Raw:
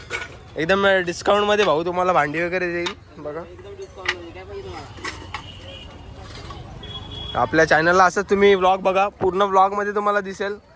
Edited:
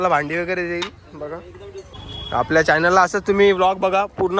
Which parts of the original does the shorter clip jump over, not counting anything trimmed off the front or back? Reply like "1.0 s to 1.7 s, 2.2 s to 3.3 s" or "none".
3.9 s to 6.9 s